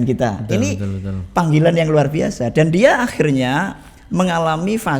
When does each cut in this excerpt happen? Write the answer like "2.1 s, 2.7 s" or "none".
none